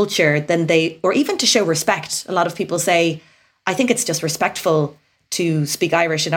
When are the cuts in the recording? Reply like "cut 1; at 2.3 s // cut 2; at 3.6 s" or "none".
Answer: none

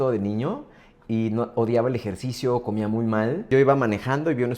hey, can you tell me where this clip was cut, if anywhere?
cut 1; at 3.4 s

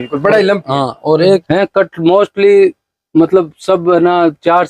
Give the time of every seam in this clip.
cut 1; at 1.4 s

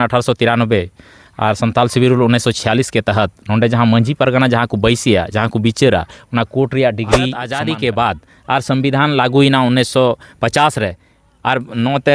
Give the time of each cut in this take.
cut 1; at 7.4 s

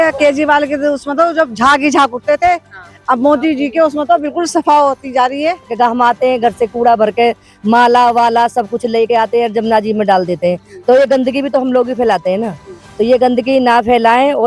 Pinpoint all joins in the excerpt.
cut 1; at 5.7 s

